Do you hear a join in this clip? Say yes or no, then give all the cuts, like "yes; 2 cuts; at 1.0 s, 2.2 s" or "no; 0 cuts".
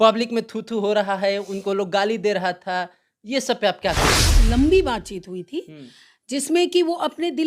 yes; 1 cut; at 4.3 s